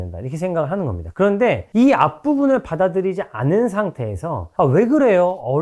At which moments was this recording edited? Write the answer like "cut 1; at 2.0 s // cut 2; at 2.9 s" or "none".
cut 1; at 1.0 s